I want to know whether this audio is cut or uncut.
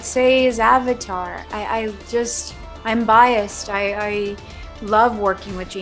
uncut